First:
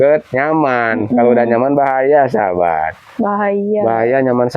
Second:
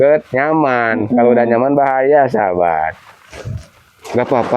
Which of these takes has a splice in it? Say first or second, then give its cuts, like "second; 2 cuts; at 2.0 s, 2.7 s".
second; 1 cut; at 3.1 s